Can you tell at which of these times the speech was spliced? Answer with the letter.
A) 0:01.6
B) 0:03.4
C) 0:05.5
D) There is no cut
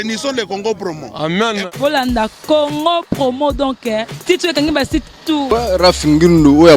C